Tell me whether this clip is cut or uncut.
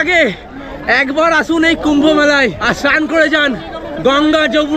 cut